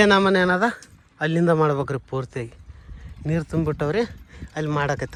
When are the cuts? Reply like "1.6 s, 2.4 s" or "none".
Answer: none